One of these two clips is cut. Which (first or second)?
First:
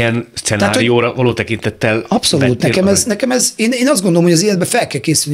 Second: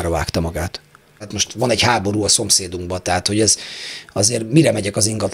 second